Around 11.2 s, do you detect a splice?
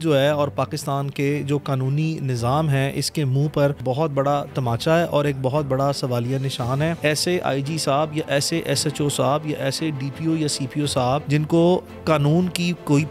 yes; 3 cuts; at 3.8 s, 7.0 s, 11.2 s

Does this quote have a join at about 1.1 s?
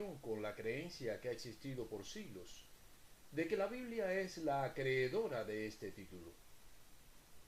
yes; 1 cut; at 1.1 s

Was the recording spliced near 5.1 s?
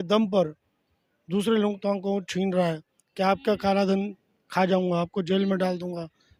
no; 0 cuts

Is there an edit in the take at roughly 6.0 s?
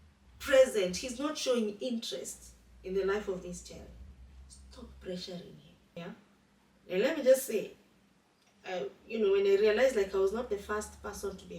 yes; 1 cut; at 6.0 s

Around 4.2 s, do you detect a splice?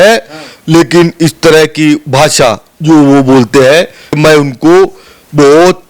yes; 1 cut; at 4.2 s

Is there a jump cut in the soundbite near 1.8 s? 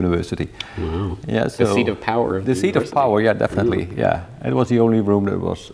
no; 1 cut; at 4.0 s

